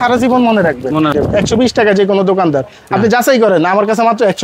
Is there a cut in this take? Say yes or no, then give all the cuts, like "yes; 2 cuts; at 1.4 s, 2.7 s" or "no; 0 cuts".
yes; 1 cut; at 1.1 s